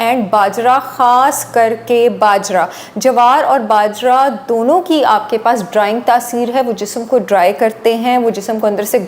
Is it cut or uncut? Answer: uncut